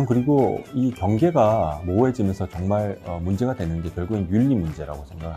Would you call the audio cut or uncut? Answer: uncut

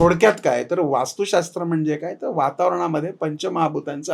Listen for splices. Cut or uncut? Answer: uncut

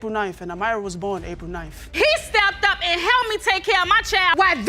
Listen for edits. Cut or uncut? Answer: cut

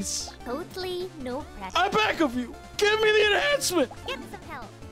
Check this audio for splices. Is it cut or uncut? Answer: cut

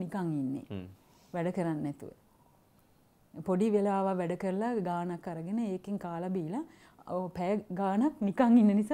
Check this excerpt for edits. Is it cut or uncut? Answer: uncut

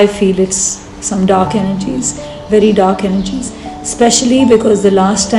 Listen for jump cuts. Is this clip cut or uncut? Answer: uncut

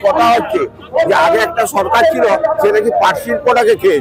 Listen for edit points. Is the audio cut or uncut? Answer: uncut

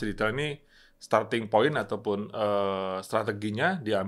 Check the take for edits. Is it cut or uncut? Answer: uncut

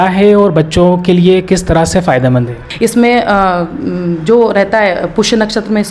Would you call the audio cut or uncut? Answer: cut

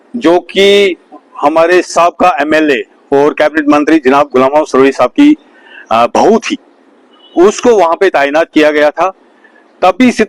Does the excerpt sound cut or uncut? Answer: uncut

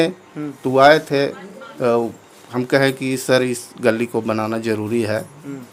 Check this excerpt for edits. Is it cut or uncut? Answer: uncut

